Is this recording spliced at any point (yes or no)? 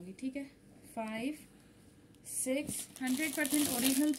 yes